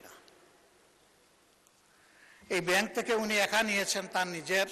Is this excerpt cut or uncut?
uncut